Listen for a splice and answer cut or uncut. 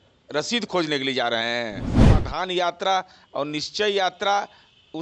cut